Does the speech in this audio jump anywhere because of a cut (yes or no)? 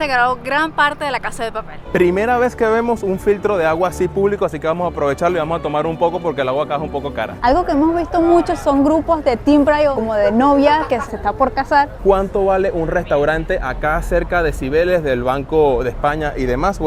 yes